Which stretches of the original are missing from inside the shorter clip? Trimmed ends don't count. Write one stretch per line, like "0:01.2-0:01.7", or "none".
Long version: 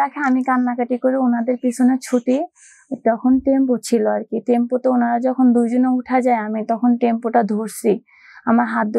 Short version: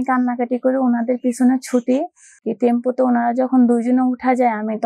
0:02.8-0:04.3